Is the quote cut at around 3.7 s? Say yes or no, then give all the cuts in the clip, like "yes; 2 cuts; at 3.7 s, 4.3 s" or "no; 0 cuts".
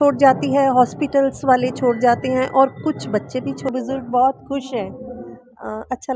yes; 1 cut; at 3.7 s